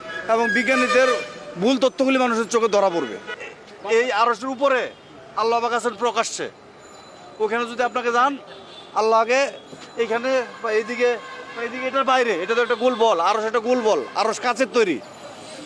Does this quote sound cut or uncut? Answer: cut